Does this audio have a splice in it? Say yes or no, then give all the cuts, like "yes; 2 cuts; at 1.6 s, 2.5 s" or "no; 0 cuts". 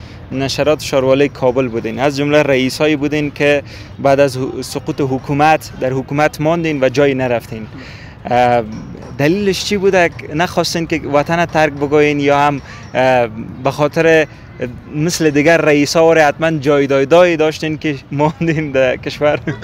no; 0 cuts